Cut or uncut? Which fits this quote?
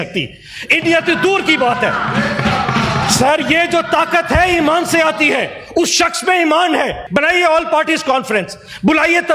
cut